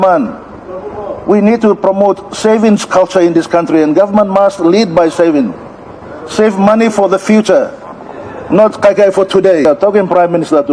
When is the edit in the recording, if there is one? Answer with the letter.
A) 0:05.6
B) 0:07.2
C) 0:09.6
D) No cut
C